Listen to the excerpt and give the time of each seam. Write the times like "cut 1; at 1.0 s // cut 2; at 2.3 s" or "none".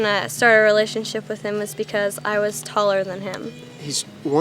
cut 1; at 3.5 s